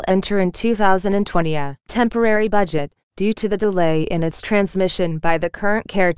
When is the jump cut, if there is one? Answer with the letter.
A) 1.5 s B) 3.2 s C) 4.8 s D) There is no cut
A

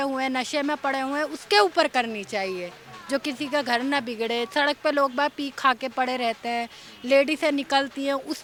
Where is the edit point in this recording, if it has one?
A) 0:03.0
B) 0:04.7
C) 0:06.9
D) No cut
D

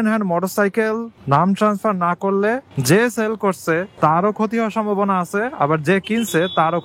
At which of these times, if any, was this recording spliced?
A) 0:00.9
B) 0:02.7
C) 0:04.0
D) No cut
D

